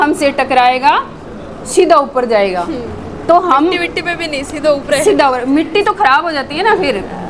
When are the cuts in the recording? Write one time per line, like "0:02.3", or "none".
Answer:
none